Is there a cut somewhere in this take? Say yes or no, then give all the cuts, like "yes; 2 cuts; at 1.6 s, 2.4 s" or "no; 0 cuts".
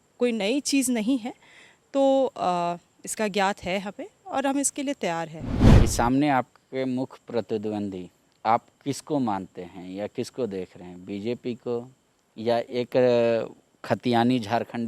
yes; 1 cut; at 5.7 s